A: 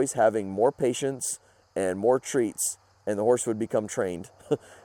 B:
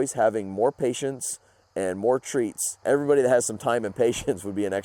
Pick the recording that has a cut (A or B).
B